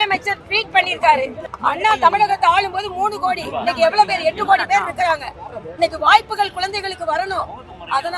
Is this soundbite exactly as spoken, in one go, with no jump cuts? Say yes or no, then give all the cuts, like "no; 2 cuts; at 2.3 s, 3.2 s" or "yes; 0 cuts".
no; 1 cut; at 1.4 s